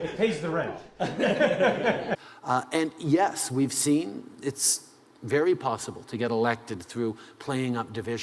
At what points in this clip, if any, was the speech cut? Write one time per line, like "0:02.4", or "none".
0:02.3